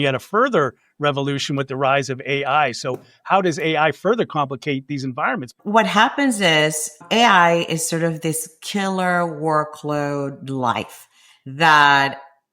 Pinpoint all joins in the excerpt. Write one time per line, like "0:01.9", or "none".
0:05.5
0:07.0